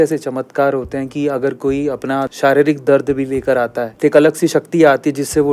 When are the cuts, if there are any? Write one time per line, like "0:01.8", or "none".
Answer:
0:02.3
0:03.8